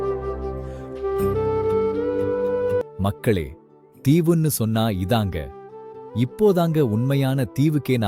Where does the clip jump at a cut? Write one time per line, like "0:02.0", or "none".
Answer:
0:02.8